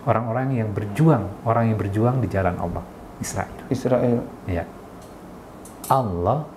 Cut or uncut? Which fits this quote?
cut